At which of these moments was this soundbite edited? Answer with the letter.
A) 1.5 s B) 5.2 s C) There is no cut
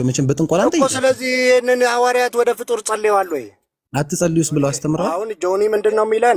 B